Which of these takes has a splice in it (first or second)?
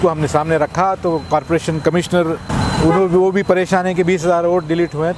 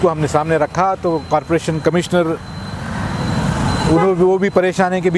first